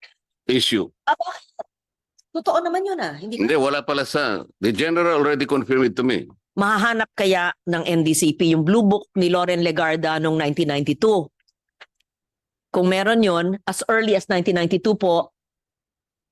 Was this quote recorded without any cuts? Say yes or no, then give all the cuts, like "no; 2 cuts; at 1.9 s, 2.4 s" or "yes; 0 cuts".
no; 1 cut; at 6.4 s